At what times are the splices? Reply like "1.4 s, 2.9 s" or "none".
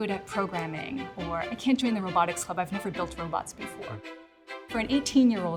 none

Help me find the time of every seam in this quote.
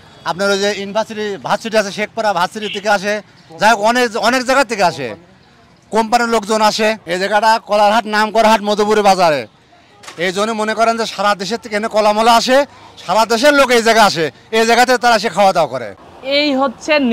15.8 s

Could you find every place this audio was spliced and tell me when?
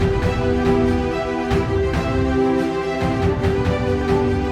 none

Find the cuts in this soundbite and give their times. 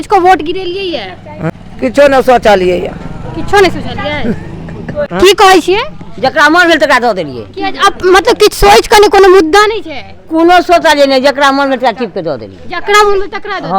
1.6 s, 5.1 s

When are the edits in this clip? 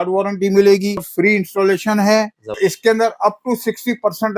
1.0 s, 2.5 s

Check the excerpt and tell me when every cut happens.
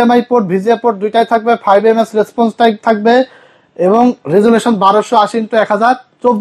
none

